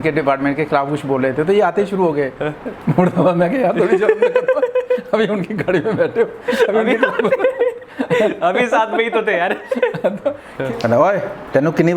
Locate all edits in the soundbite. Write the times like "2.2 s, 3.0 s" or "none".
10.5 s